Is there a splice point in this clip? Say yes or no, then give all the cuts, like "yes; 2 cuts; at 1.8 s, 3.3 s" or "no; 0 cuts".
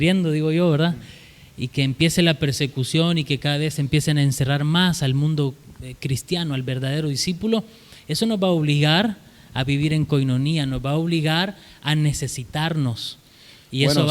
no; 0 cuts